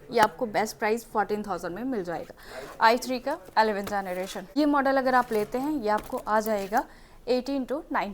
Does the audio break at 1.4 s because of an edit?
no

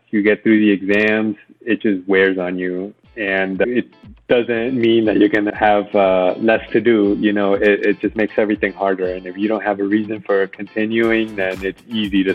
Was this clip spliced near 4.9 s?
no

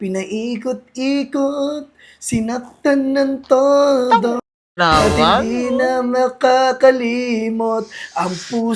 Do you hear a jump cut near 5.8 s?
no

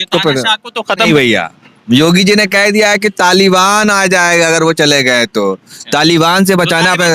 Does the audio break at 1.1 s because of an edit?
yes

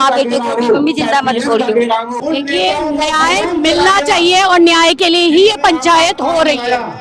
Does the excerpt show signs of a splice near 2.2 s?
yes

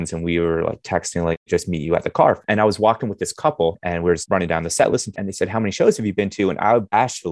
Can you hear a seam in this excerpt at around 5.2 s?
yes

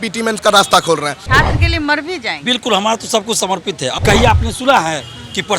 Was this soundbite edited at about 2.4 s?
no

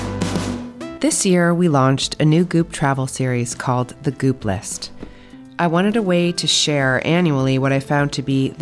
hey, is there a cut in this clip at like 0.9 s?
yes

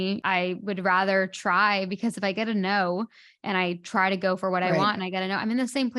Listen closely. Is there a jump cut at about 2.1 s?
yes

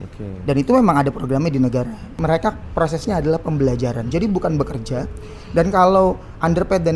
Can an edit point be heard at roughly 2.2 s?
yes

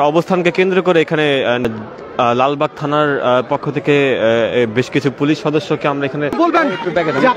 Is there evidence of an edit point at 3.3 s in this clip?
no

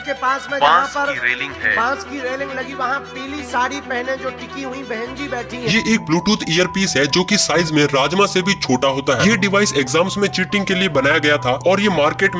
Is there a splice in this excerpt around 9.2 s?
yes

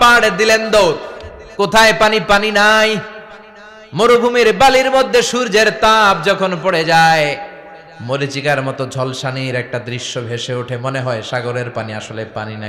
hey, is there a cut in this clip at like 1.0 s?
no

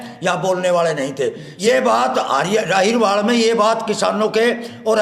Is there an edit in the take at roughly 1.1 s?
no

